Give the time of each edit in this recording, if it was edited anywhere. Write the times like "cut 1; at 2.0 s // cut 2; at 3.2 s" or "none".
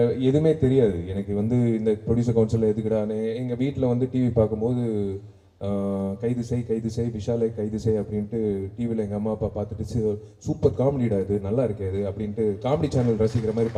none